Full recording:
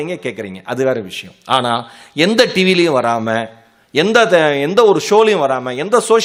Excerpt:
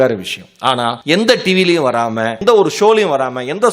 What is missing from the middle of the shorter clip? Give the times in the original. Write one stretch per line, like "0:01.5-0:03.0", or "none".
0:01.8-0:02.1
0:03.5-0:04.7